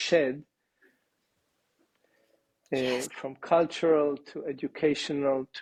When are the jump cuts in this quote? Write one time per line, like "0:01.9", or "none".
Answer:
none